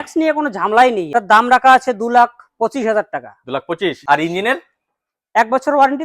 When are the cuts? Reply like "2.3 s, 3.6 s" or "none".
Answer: 1.0 s, 4.0 s